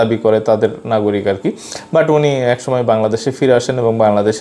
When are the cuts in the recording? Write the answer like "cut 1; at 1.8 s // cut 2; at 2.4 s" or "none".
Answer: none